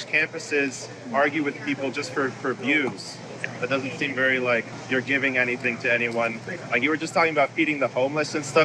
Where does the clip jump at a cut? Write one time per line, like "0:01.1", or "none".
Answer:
0:04.8
0:06.6